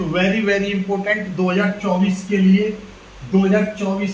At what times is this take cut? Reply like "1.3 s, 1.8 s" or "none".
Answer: none